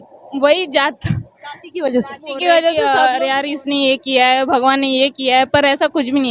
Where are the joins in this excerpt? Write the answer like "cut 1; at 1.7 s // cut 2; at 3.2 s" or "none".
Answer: cut 1; at 2.8 s